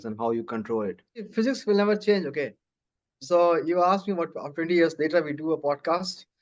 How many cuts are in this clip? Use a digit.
1